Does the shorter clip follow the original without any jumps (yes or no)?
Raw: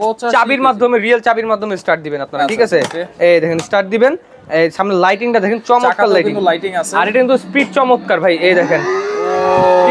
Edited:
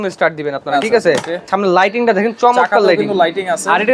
no